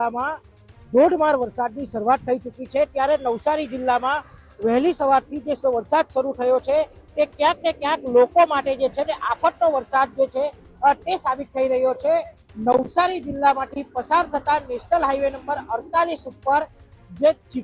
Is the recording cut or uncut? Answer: uncut